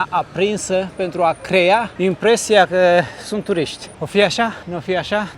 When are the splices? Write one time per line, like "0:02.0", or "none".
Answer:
none